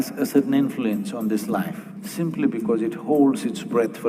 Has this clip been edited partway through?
no; 0 cuts

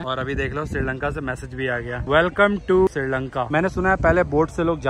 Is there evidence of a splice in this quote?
yes; 1 cut; at 2.9 s

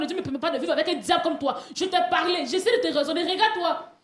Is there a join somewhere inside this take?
no; 0 cuts

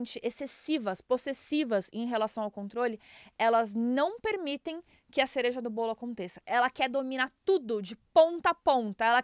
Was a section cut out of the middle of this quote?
no; 0 cuts

